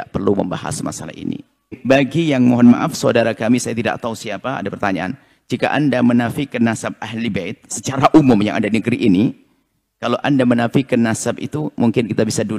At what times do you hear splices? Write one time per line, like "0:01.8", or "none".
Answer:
0:01.8

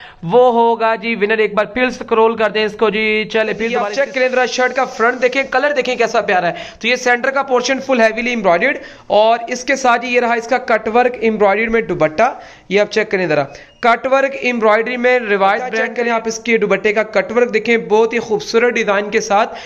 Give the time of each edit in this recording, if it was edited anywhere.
0:03.8
0:15.8

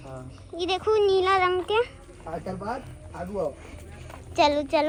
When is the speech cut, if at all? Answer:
none

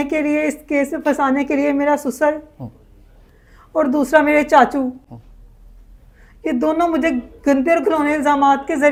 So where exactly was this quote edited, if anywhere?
none

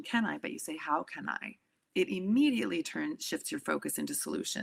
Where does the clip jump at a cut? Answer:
none

